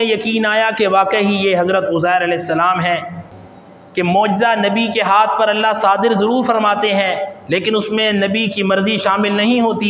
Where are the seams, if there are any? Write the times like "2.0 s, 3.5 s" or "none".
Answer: 3.3 s